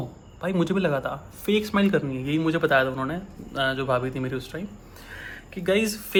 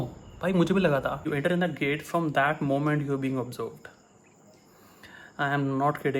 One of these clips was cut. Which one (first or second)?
second